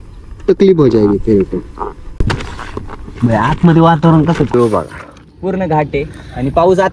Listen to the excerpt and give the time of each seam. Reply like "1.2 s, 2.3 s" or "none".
2.3 s, 4.5 s